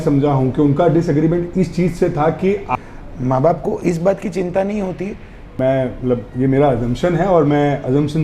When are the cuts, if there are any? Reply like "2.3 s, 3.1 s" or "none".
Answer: 2.7 s, 5.5 s